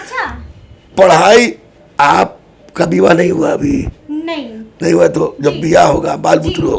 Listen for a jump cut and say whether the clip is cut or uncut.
uncut